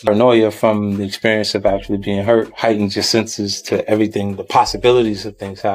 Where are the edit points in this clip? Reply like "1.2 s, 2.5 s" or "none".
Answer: none